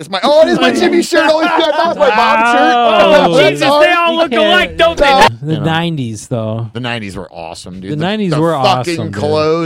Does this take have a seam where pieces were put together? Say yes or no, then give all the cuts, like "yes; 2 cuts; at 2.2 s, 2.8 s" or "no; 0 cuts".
yes; 1 cut; at 5.3 s